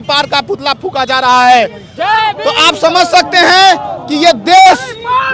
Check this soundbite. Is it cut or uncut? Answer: uncut